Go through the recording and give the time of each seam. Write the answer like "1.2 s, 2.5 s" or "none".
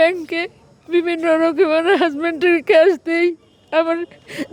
none